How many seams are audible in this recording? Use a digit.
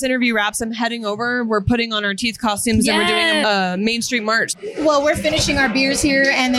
2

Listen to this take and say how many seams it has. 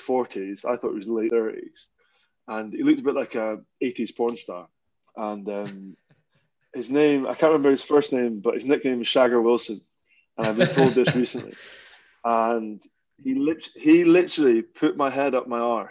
1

